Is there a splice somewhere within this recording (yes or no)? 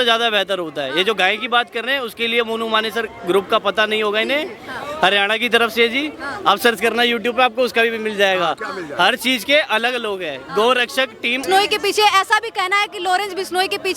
yes